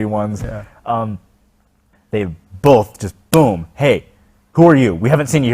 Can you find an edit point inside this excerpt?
yes; 1 cut; at 1.8 s

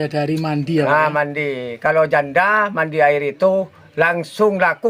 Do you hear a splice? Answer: no; 0 cuts

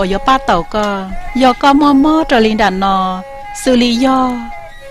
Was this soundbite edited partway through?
yes; 1 cut; at 4.0 s

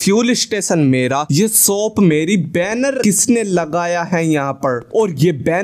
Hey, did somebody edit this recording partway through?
yes; 2 cuts; at 1.3 s, 3.0 s

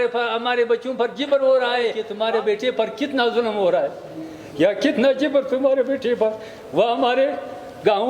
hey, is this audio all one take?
no; 1 cut; at 2.0 s

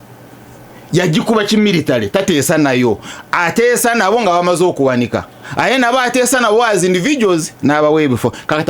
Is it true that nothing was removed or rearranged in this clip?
yes; 0 cuts

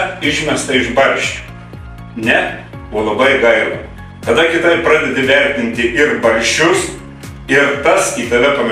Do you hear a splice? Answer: no; 0 cuts

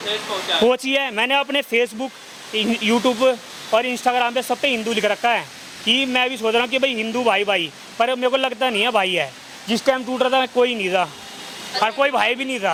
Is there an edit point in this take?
no; 0 cuts

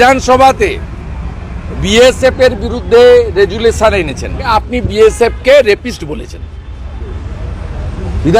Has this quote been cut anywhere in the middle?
yes; 1 cut; at 4.4 s

